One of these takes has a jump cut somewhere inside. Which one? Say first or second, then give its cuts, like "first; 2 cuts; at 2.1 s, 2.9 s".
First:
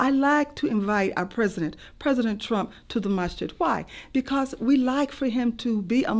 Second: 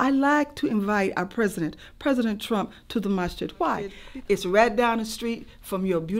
second; 1 cut; at 4.0 s